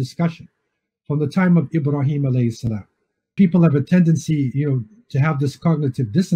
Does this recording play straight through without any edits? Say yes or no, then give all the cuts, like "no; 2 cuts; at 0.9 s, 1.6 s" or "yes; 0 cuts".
no; 1 cut; at 3.3 s